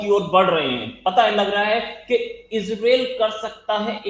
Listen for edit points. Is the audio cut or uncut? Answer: uncut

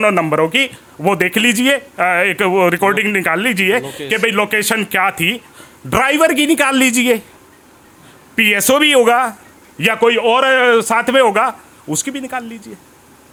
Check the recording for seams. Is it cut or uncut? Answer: uncut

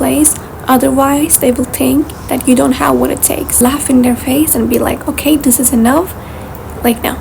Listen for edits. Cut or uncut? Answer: cut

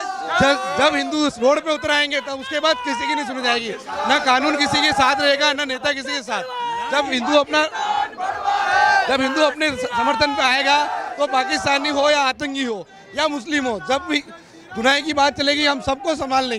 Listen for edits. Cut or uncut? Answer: uncut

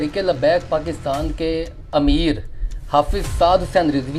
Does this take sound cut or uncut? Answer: cut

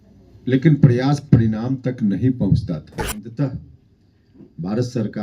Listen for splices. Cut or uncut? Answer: cut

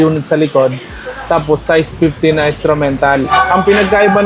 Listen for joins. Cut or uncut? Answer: cut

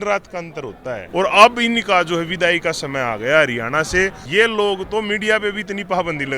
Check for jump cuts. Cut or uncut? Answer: cut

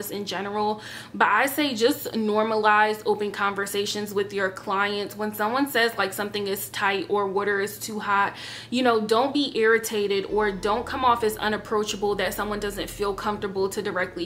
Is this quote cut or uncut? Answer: uncut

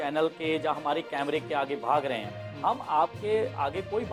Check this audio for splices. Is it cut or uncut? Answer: uncut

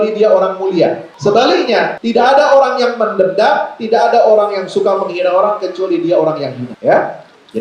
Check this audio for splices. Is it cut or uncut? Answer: cut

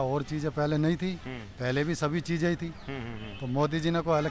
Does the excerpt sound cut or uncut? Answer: uncut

